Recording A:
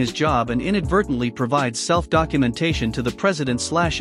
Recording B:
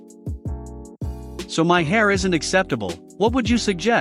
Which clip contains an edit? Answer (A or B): B